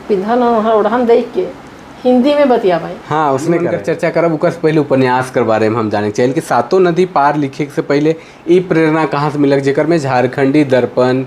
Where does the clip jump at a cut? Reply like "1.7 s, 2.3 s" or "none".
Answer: 3.7 s